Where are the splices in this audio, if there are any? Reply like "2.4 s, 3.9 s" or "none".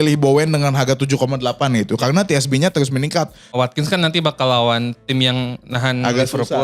3.5 s